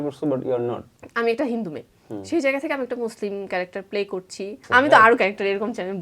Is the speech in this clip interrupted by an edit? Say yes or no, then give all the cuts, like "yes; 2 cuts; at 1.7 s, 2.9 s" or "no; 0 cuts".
yes; 2 cuts; at 0.9 s, 4.6 s